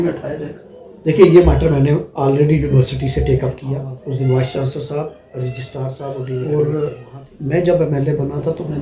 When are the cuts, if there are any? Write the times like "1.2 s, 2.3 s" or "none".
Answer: 6.4 s